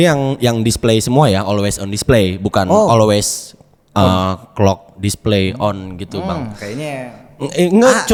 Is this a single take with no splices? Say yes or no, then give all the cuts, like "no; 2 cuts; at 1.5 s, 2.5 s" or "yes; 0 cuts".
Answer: yes; 0 cuts